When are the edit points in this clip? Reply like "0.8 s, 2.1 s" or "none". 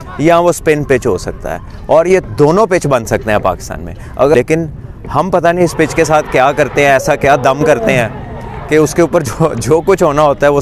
4.3 s